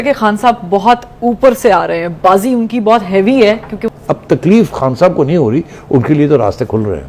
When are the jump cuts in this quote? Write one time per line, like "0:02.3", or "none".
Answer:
0:03.8